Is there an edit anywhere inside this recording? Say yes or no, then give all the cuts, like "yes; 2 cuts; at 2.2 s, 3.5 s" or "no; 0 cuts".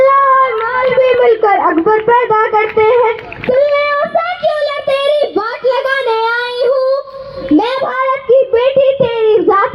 no; 0 cuts